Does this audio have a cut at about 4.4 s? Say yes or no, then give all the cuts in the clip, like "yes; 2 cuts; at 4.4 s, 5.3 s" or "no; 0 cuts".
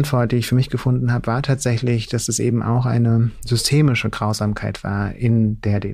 no; 0 cuts